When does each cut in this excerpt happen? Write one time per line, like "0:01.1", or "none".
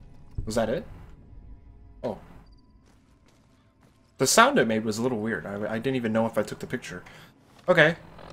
0:06.2